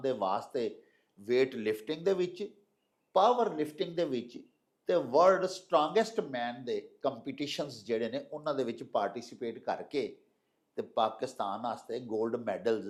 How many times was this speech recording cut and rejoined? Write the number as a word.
zero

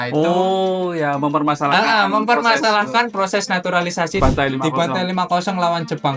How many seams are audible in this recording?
one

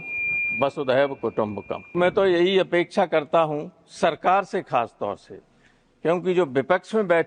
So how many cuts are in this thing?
one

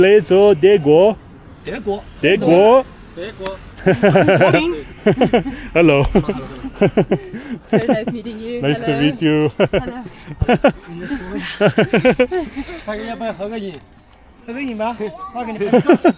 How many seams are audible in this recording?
zero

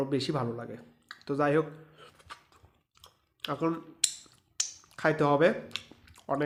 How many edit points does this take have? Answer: zero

